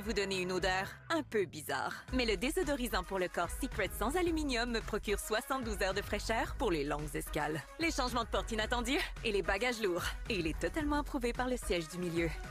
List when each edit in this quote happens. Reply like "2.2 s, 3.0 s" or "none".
none